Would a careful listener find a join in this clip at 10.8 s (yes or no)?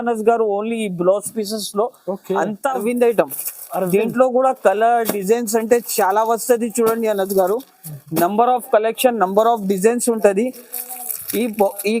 no